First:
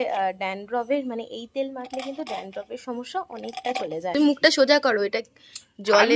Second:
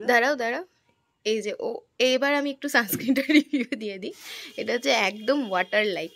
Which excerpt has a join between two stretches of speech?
first; 1 cut; at 4.1 s

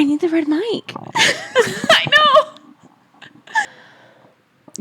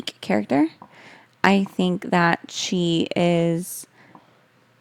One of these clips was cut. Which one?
first; 1 cut; at 3.7 s

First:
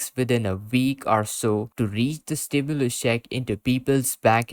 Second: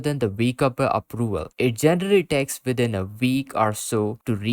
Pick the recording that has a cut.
second; 1 cut; at 1.5 s

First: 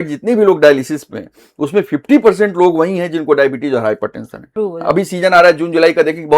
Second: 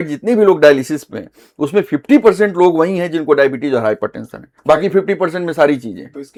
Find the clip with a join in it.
first; 1 cut; at 4.4 s

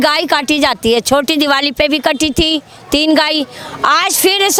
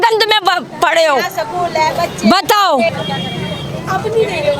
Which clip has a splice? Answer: second; 1 cut; at 2.9 s

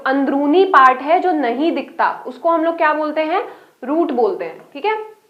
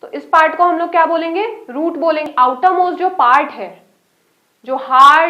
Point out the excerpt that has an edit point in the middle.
second; 1 cut; at 2.3 s

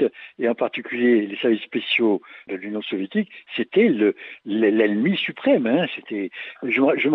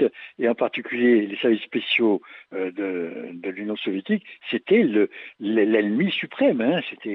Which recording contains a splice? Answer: first; 1 cut; at 2.4 s

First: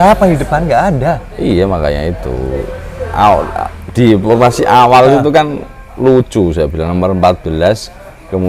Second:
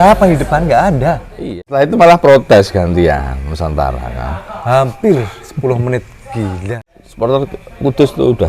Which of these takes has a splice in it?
second; 2 cuts; at 1.4 s, 6.7 s

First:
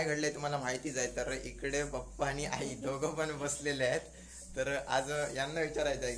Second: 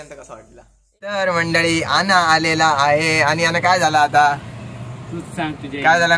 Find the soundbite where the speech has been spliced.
second; 1 cut; at 1.2 s

